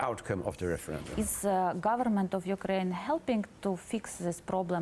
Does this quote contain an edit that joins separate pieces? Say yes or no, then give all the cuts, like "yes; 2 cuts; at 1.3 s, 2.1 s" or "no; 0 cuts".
yes; 1 cut; at 1.0 s